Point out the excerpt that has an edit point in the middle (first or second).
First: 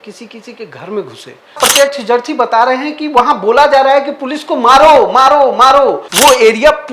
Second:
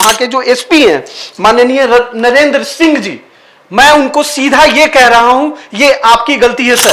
first